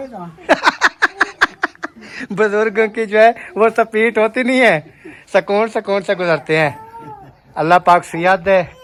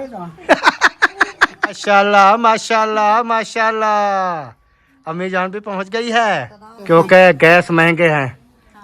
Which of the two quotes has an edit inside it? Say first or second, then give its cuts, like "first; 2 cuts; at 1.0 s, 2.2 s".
second; 2 cuts; at 1.7 s, 6.7 s